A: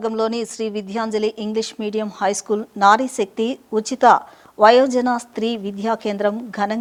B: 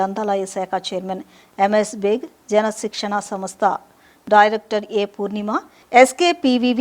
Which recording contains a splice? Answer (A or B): B